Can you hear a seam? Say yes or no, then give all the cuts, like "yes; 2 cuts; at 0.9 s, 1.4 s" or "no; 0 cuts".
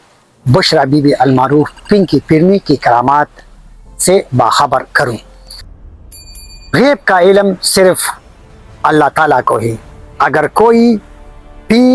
yes; 1 cut; at 5.2 s